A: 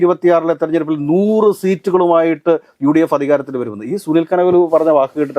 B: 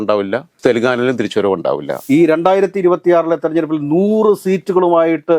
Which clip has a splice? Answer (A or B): B